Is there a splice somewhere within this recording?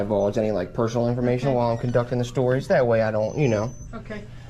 no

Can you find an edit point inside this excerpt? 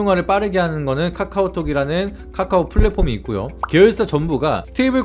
no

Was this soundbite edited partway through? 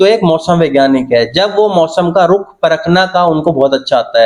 no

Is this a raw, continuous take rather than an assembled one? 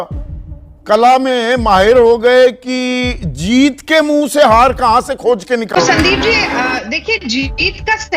no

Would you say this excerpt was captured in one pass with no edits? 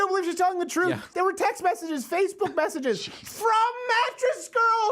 no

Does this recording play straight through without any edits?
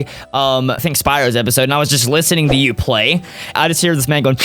no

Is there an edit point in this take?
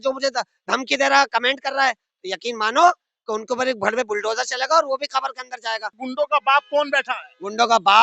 yes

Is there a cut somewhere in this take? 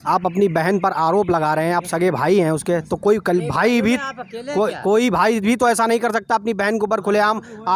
no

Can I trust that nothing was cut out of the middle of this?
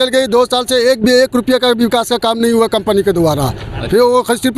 yes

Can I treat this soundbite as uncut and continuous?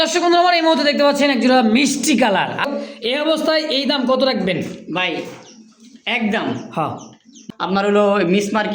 no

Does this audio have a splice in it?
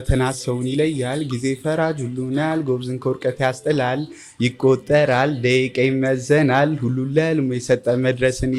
no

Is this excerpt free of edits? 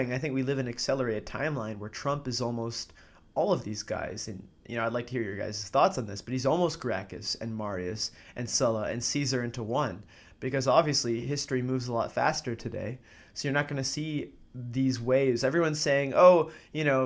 yes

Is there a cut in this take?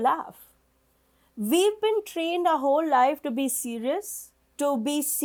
no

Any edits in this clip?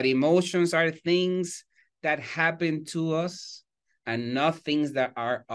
no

